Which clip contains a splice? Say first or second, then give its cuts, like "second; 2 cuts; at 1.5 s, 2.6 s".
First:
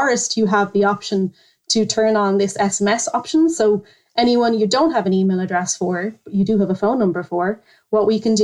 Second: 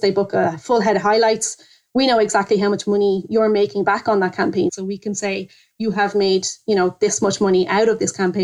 second; 1 cut; at 4.7 s